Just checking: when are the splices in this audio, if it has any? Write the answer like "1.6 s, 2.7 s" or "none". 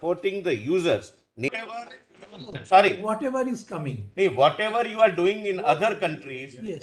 1.5 s